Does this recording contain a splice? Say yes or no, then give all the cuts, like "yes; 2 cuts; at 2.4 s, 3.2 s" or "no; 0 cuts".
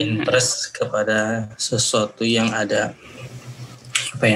no; 0 cuts